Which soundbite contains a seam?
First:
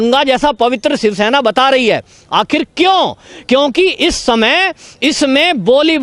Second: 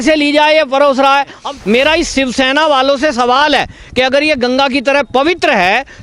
second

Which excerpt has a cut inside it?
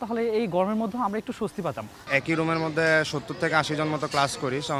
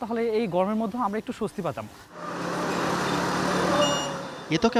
first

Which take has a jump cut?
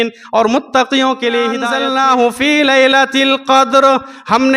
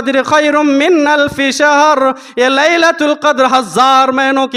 first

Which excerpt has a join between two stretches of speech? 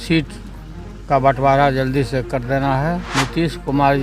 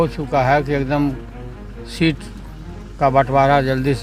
first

